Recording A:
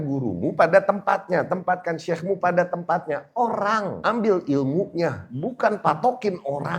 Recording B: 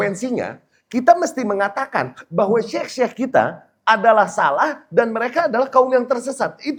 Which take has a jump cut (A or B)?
A